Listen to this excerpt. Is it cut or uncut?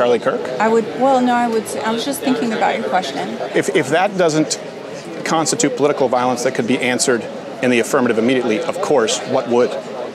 cut